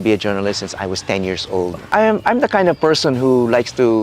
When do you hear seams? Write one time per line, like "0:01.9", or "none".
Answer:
0:01.8